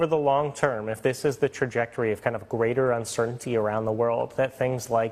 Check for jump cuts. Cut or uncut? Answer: uncut